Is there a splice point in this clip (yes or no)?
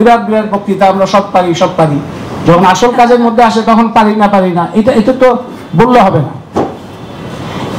no